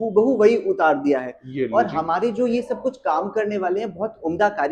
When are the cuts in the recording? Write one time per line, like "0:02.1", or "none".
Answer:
none